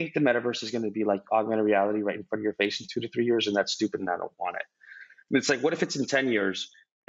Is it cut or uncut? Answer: uncut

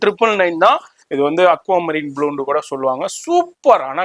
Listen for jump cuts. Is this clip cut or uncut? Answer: cut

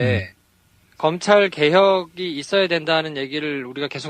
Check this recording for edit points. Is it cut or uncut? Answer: cut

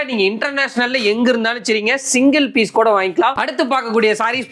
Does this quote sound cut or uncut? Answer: cut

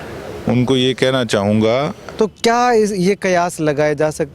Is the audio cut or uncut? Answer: cut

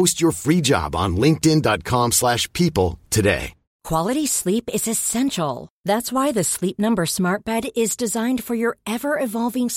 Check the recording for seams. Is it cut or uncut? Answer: cut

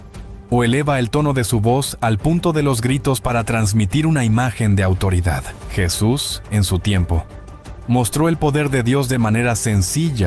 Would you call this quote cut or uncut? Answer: cut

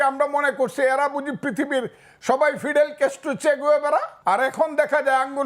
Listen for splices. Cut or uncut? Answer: cut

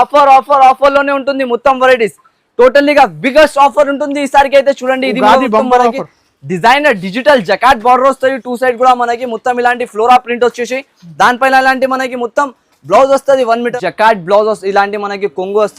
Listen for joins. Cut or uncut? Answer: cut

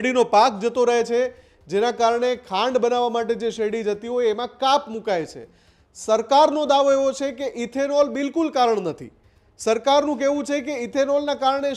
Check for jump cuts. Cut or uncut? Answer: uncut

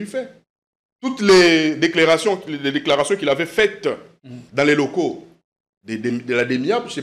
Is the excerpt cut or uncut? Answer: uncut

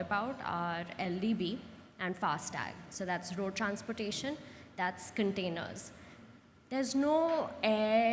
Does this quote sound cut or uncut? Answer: uncut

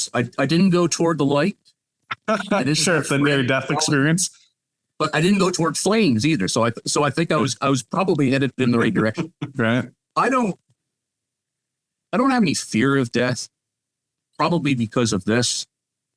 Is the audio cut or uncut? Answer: uncut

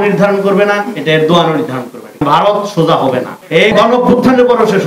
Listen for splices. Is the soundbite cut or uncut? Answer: cut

